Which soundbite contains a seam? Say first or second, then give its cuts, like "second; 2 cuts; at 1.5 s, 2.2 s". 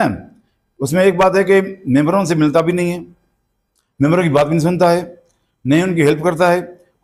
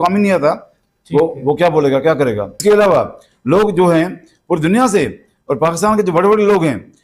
second; 1 cut; at 2.5 s